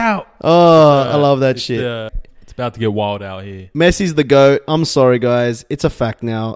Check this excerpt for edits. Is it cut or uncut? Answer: cut